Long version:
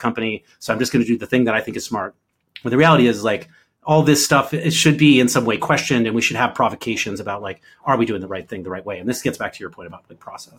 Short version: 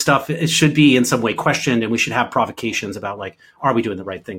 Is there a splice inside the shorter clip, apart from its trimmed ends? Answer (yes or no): no